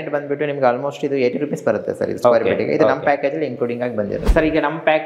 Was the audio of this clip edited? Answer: yes; 2 cuts; at 1.3 s, 4.3 s

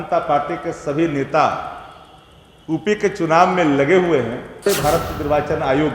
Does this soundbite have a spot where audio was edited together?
yes; 1 cut; at 4.6 s

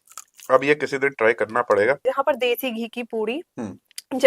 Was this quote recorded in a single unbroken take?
no; 1 cut; at 2.0 s

